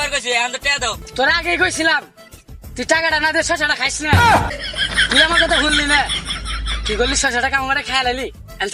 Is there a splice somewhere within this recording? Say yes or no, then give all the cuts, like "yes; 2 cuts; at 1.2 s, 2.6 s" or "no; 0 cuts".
yes; 1 cut; at 1.0 s